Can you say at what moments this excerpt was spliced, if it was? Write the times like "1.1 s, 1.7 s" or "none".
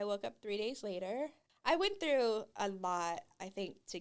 1.5 s